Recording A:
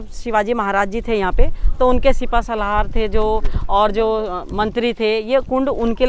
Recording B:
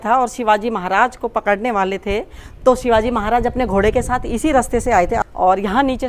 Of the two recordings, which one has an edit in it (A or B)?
B